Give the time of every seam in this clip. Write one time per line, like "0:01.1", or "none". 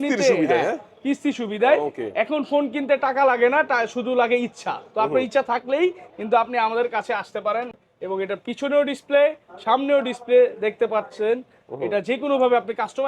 0:07.7